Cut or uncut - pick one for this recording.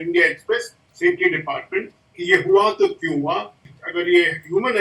cut